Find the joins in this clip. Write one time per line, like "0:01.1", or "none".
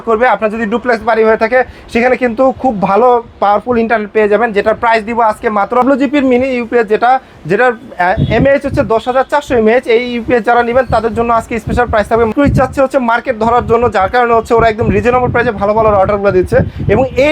0:05.8
0:12.3